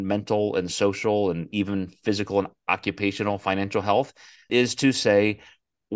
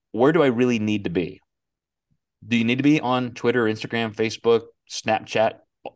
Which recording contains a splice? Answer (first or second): first